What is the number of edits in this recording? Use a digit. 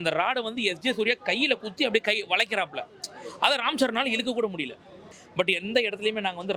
1